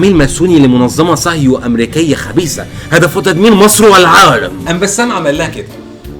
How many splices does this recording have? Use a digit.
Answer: 1